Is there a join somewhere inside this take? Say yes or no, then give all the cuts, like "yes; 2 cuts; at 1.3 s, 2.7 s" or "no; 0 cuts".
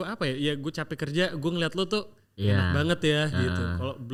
no; 0 cuts